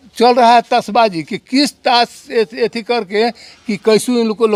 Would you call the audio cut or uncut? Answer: uncut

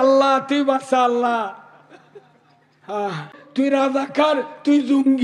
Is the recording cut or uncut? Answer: cut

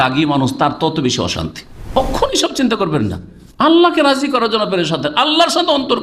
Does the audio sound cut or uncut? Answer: cut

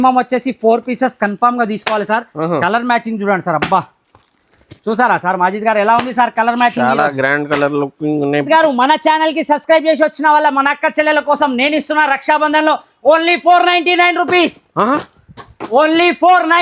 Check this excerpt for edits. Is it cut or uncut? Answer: cut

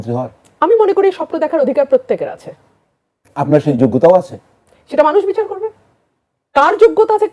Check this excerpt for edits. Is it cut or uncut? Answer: uncut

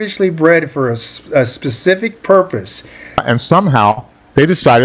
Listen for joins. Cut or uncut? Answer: cut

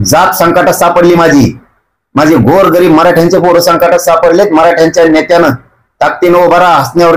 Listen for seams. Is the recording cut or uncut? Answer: uncut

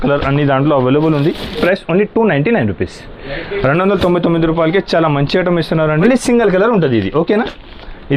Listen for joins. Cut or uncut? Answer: cut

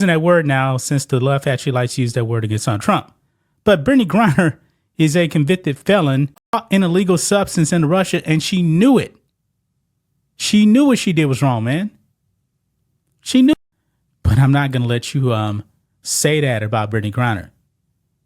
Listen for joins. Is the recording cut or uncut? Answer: cut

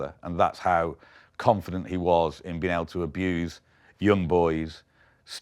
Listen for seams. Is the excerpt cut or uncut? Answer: uncut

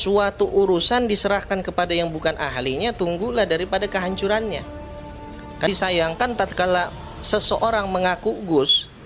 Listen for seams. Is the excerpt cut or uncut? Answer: cut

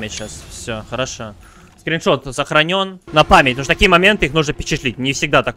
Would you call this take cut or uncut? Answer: cut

